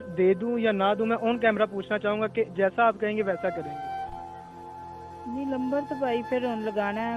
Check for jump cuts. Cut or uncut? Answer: uncut